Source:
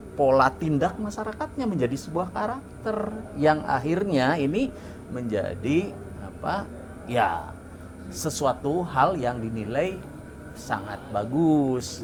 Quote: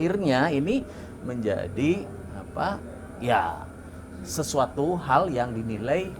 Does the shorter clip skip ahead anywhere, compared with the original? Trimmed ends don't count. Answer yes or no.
no